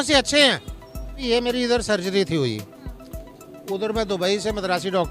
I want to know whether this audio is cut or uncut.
cut